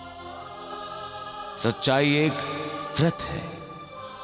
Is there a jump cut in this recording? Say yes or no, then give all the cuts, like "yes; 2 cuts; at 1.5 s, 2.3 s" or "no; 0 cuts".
no; 0 cuts